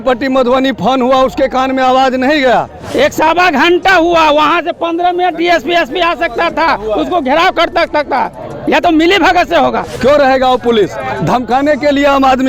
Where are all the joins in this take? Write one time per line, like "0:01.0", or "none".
0:02.8
0:09.9